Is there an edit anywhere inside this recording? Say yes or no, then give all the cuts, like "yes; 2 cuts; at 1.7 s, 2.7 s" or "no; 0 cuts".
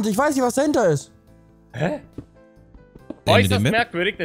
no; 0 cuts